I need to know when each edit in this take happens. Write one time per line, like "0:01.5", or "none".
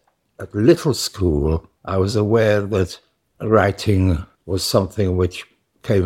0:01.7
0:04.3